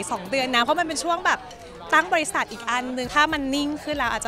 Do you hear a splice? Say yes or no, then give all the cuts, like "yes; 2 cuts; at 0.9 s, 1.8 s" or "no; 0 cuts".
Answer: yes; 1 cut; at 3.1 s